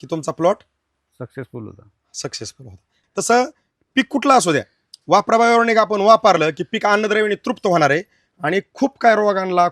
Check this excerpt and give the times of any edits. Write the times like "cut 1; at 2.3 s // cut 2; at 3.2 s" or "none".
cut 1; at 2.9 s